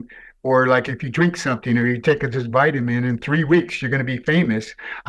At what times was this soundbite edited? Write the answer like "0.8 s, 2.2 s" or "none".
0.9 s